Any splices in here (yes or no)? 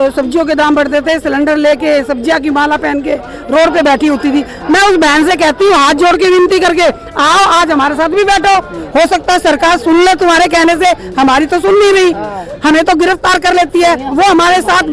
no